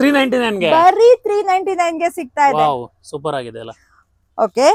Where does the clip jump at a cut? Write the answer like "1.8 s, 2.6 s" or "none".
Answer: none